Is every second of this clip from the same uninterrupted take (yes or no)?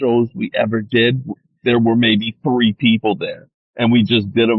yes